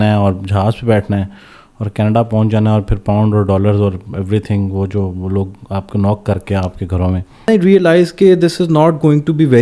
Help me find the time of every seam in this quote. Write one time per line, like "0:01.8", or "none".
0:07.5